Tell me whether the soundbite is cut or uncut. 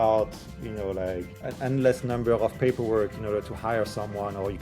cut